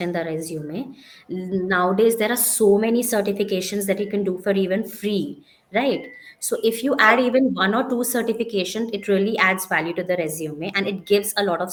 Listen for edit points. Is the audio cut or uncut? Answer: uncut